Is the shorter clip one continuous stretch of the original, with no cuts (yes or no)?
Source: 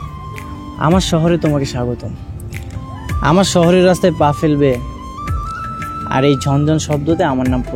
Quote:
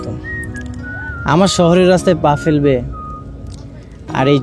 yes